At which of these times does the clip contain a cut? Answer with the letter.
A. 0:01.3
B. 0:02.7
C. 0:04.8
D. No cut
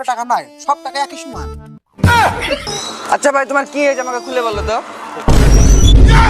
B